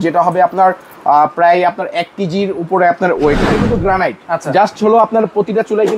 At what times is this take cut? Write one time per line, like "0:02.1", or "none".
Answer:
0:03.4